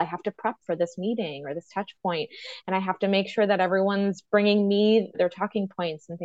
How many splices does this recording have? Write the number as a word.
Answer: one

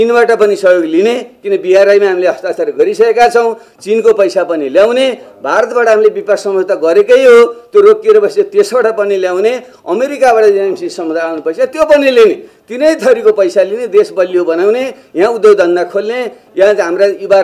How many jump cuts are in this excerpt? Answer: zero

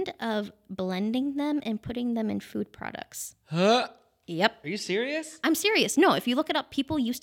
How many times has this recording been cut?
zero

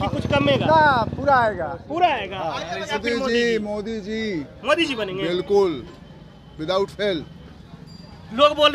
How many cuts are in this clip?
one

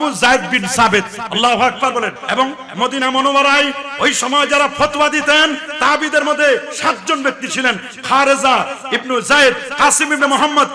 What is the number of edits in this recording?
one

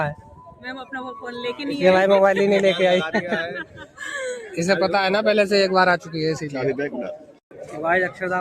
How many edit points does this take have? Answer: one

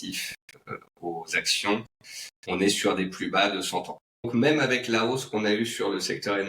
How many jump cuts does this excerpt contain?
one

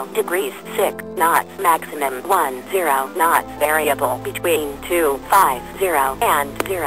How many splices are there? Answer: zero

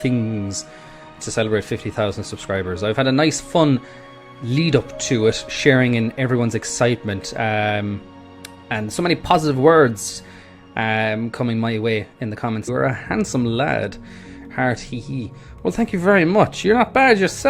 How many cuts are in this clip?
zero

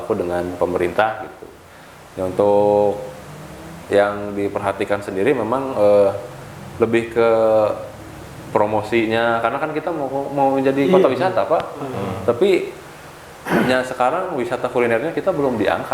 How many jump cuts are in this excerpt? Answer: zero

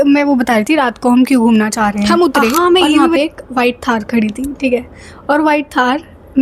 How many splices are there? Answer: one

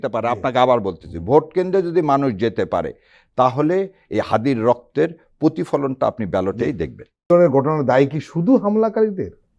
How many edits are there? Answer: one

